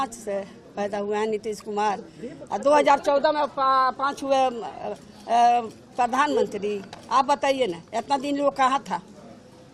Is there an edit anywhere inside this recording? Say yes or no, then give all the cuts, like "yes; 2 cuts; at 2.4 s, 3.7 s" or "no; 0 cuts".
no; 0 cuts